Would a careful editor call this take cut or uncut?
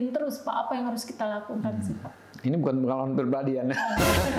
uncut